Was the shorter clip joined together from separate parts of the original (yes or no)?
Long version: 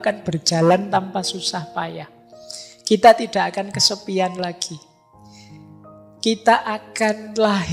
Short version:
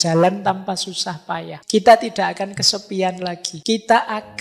yes